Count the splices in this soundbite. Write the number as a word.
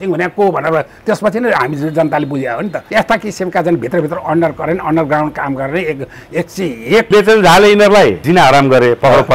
two